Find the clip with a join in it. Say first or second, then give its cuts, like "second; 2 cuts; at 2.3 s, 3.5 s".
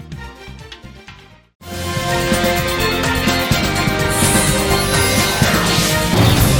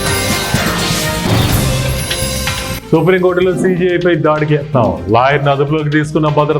second; 1 cut; at 2.8 s